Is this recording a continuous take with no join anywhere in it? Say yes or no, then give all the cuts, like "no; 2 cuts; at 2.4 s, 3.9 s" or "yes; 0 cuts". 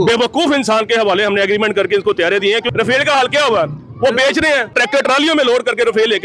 no; 2 cuts; at 2.7 s, 4.7 s